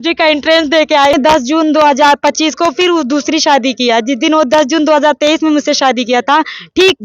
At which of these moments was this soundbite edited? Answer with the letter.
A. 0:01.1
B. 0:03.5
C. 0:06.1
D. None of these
A